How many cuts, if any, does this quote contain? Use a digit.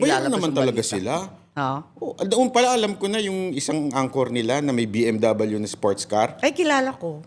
1